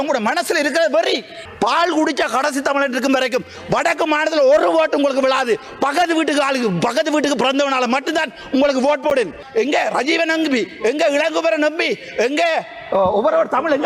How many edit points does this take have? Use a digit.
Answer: 2